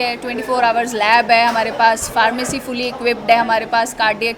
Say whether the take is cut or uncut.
uncut